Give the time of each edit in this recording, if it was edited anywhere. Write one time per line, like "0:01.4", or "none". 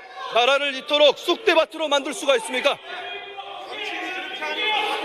none